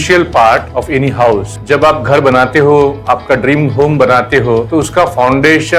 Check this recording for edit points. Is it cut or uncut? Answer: cut